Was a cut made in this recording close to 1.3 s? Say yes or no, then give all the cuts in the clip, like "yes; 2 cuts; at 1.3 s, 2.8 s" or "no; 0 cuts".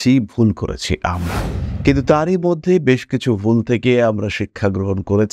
no; 0 cuts